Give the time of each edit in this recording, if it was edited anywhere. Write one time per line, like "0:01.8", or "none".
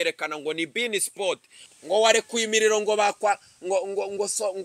0:01.7

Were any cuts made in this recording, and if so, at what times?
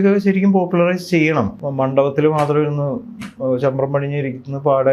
0:01.5

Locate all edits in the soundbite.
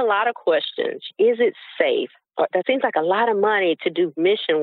0:01.1

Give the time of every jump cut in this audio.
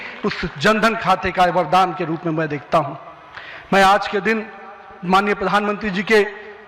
none

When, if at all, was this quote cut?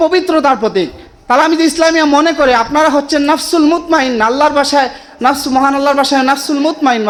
none

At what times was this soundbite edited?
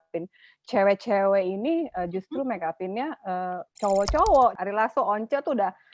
0:03.7
0:04.6

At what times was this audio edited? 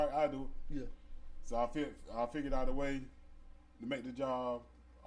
none

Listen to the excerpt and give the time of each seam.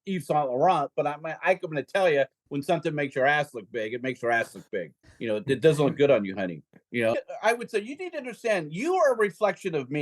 0:07.2

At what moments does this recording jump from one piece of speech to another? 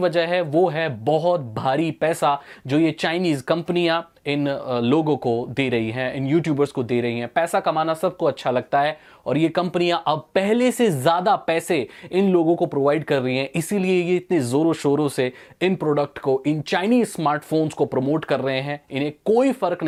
none

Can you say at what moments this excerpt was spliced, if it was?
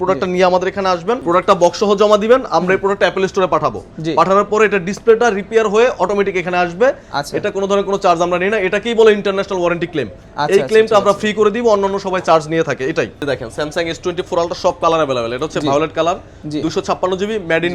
0:13.2

